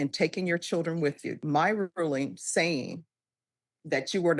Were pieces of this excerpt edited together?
yes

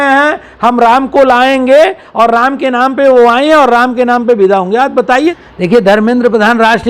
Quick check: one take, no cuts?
no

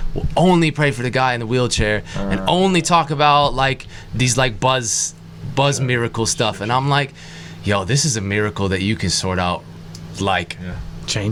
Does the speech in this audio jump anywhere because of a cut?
no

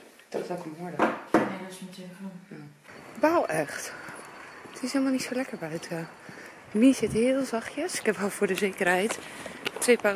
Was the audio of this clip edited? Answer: no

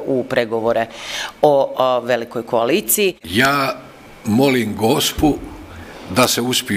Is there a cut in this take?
yes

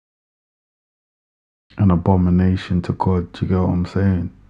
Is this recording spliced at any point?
no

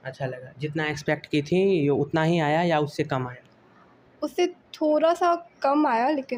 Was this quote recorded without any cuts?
yes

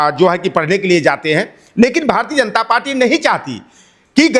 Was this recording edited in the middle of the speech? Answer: no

